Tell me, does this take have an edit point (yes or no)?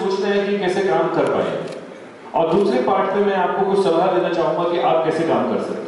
no